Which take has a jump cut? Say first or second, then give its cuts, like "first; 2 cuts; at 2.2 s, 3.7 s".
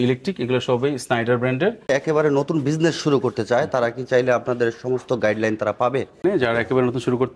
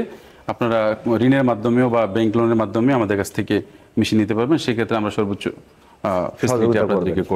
first; 2 cuts; at 1.9 s, 6.2 s